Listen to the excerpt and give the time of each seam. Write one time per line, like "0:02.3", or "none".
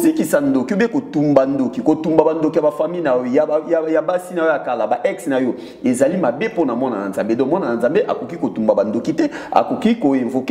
none